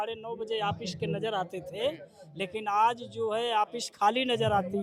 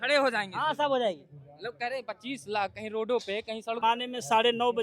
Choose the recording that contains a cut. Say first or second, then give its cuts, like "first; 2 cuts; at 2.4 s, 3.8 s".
second; 1 cut; at 3.8 s